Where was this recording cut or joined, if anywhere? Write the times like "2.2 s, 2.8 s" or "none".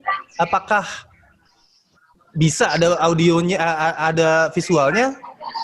none